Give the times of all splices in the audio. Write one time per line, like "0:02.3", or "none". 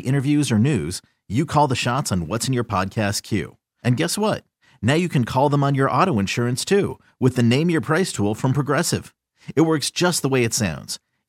none